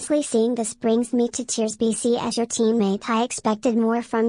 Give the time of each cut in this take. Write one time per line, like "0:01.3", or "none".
none